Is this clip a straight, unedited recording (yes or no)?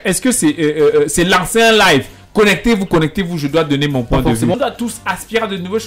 no